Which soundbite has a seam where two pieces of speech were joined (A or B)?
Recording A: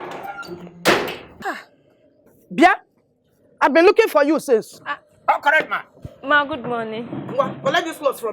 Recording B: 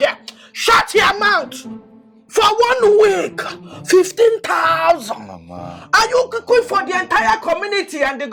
A